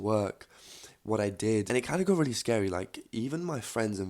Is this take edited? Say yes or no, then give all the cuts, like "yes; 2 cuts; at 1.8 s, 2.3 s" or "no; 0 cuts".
yes; 1 cut; at 1.7 s